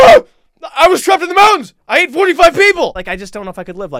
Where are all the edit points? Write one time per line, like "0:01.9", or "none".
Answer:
0:02.9